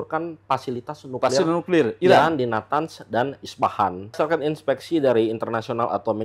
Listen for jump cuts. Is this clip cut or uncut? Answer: cut